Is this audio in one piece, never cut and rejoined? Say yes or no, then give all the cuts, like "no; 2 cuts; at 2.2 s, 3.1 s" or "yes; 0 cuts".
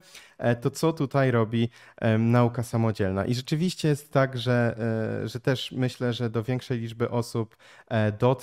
yes; 0 cuts